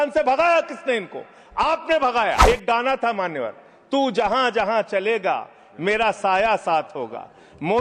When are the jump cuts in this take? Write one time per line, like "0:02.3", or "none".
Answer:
0:02.4

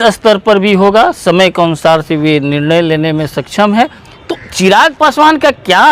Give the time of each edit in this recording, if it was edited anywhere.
0:04.0

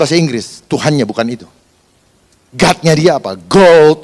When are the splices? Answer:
none

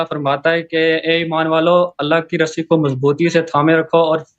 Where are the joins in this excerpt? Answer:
none

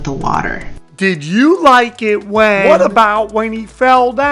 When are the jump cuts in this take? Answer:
0:02.6

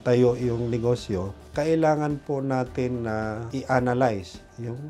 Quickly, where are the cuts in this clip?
0:01.4
0:03.5

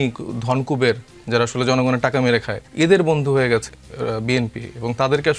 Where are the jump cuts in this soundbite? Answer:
0:02.6

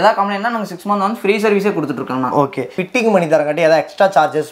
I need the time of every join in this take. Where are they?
0:02.8

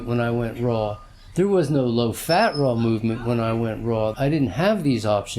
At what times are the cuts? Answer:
0:04.1

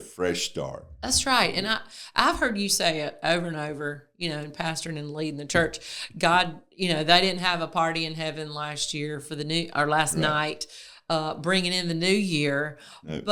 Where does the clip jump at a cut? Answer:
none

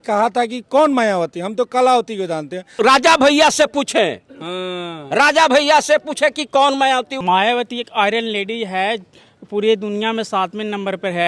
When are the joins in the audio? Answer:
0:02.6
0:07.1

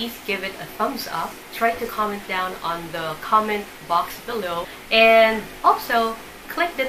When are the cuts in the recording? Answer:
0:01.4
0:04.8

